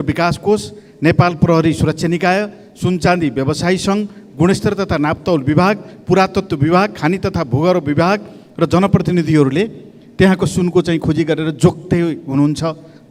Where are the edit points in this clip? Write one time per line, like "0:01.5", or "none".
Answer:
none